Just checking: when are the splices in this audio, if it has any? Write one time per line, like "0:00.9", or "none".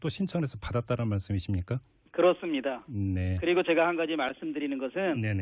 0:01.2